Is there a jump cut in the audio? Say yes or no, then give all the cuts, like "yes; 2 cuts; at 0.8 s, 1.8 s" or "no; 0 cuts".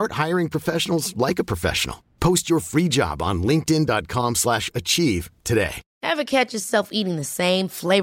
yes; 1 cut; at 5.8 s